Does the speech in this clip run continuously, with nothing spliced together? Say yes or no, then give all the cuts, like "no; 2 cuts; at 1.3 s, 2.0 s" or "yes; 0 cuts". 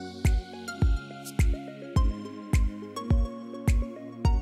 yes; 0 cuts